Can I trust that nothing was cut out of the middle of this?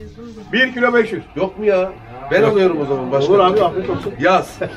yes; 0 cuts

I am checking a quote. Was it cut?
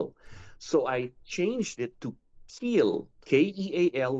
yes; 1 cut; at 3.2 s

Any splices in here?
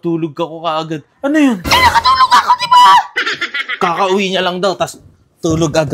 no; 0 cuts

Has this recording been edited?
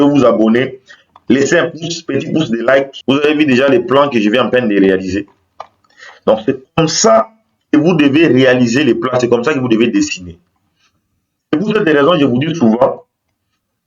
yes; 1 cut; at 2.9 s

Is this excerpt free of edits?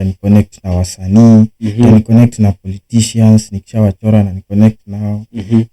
yes; 0 cuts

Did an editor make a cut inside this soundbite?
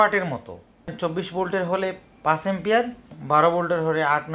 yes; 2 cuts; at 0.9 s, 3.1 s

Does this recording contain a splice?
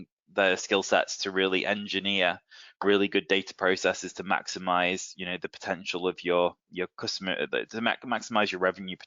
no; 0 cuts

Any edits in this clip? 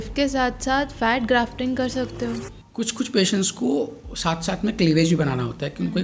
yes; 1 cut; at 2.6 s

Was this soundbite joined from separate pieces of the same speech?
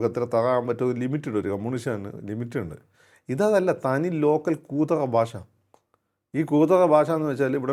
no; 0 cuts

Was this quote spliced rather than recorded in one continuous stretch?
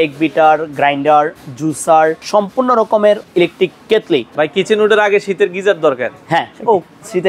yes; 3 cuts; at 2.2 s, 3.2 s, 4.3 s

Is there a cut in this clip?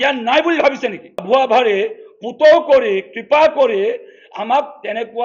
yes; 1 cut; at 1.2 s

